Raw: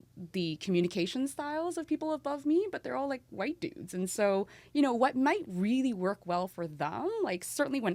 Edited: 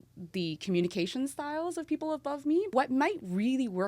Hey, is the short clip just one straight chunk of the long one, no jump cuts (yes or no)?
no